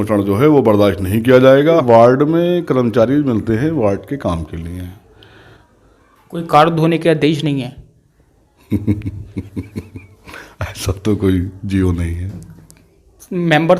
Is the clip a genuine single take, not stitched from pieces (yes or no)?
no